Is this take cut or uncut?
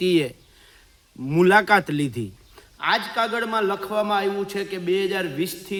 uncut